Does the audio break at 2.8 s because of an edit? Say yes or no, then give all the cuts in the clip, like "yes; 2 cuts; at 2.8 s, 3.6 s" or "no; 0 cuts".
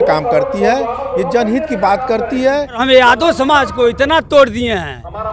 yes; 1 cut; at 2.8 s